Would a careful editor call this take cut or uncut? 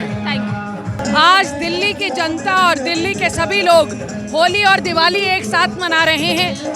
cut